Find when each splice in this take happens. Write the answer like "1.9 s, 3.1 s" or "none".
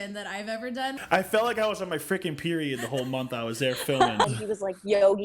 1.0 s, 4.2 s